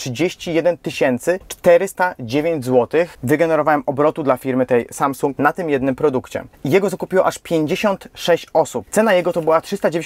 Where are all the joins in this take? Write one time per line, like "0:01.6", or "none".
0:06.4
0:08.8

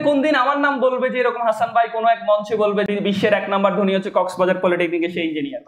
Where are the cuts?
0:02.9

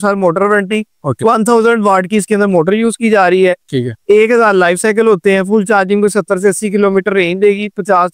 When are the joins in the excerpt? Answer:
none

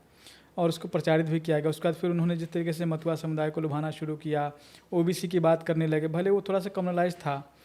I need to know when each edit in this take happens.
none

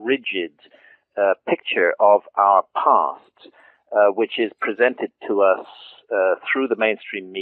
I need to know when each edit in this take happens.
0:04.6

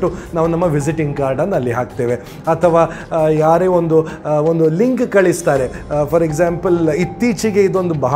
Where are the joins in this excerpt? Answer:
none

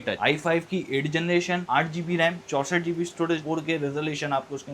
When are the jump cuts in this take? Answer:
none

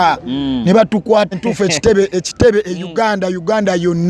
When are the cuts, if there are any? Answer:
0:01.4

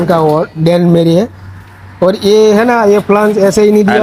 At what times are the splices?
none

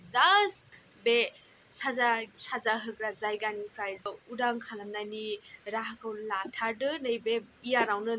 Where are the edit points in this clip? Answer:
0:04.0

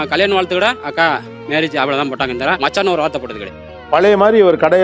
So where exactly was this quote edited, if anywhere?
0:01.0
0:03.6

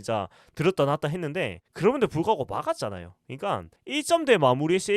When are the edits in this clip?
0:03.7

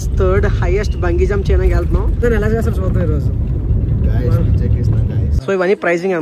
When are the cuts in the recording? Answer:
0:02.1
0:05.3

